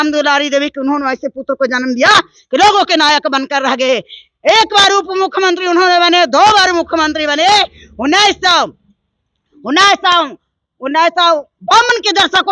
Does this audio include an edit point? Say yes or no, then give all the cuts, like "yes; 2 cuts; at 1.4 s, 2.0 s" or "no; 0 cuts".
no; 0 cuts